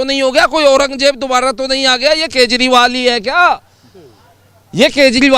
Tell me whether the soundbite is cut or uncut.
uncut